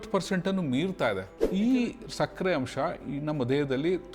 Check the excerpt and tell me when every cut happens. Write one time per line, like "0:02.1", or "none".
0:01.3